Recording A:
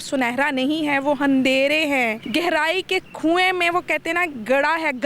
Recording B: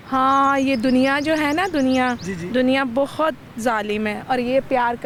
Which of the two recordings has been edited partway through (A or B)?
A